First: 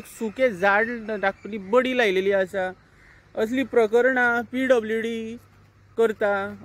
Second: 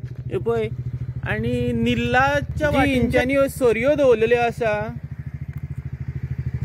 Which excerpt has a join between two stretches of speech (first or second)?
second